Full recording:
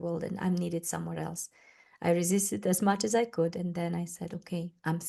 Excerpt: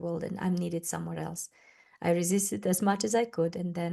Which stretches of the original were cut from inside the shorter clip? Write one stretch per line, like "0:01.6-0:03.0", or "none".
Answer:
none